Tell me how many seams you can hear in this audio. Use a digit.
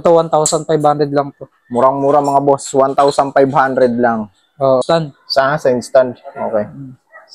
1